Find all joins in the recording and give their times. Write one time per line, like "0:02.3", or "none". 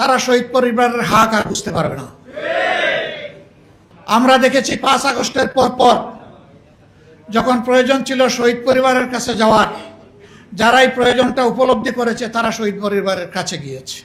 none

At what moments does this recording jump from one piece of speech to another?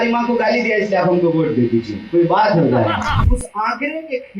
0:03.3

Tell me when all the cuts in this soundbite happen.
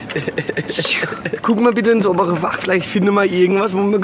0:01.4

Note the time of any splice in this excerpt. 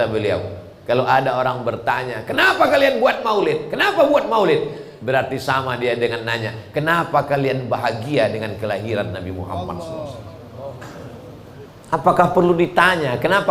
0:11.7

